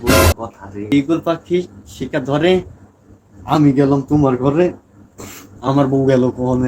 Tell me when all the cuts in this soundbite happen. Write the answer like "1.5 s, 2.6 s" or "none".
0.9 s